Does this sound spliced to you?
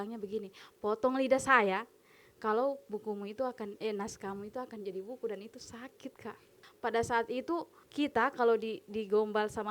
yes; 2 cuts; at 6.6 s, 7.8 s

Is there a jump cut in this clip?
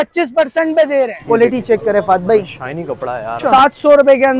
yes; 2 cuts; at 1.2 s, 3.3 s

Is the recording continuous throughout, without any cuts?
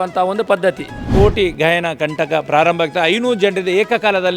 no; 1 cut; at 0.9 s

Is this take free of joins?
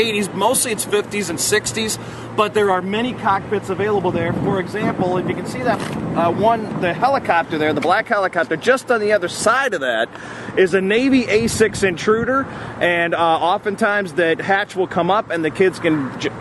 no; 1 cut; at 4.0 s

